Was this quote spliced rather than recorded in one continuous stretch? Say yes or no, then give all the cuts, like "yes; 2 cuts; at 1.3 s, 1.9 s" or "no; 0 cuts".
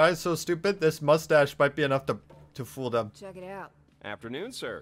no; 0 cuts